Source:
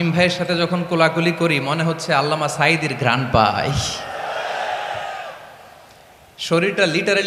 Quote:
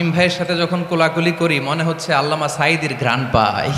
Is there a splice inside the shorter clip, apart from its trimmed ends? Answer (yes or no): no